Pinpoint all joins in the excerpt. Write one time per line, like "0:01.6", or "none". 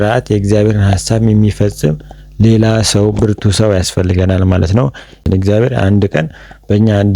0:05.2